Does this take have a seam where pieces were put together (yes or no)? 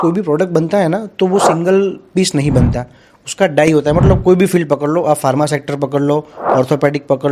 no